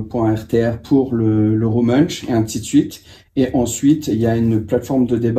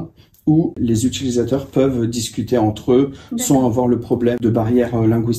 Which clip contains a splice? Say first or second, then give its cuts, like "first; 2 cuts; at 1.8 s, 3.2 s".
second; 2 cuts; at 0.8 s, 4.4 s